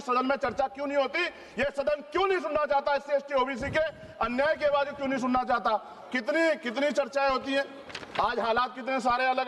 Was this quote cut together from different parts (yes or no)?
no